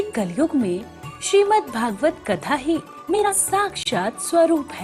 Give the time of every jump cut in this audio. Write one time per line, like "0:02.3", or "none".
0:03.3